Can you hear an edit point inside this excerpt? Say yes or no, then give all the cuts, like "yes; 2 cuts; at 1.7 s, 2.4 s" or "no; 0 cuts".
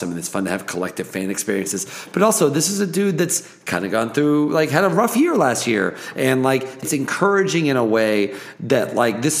yes; 1 cut; at 6.9 s